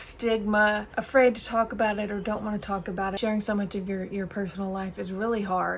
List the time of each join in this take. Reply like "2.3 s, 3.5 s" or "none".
0.9 s, 3.2 s